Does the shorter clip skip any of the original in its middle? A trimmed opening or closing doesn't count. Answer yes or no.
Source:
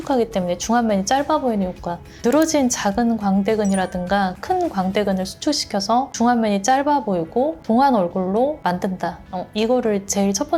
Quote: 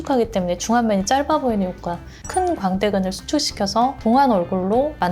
yes